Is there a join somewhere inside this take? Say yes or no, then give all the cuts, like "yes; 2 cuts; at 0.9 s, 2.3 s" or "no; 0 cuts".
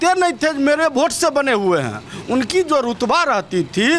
no; 0 cuts